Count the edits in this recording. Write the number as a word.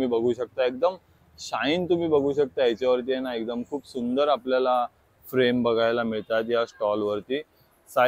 zero